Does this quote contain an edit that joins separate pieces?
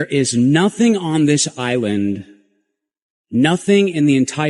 no; 0 cuts

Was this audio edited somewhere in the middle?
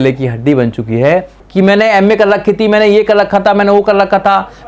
yes; 1 cut; at 1.4 s

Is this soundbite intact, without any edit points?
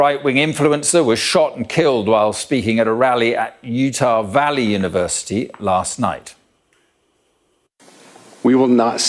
yes; 0 cuts

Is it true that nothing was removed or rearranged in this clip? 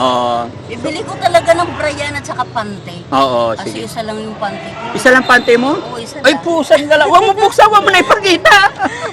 yes; 0 cuts

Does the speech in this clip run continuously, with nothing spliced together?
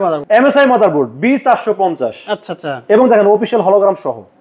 yes; 0 cuts

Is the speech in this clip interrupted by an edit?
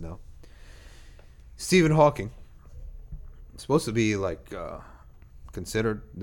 no; 0 cuts

